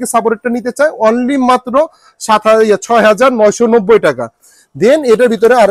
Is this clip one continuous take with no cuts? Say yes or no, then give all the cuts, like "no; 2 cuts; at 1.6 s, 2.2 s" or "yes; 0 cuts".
yes; 0 cuts